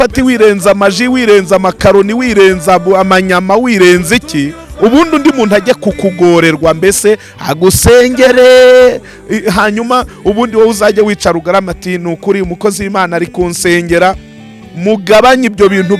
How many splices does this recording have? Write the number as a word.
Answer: zero